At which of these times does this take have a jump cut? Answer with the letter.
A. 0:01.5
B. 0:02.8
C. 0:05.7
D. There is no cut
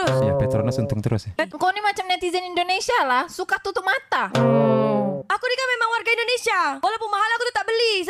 A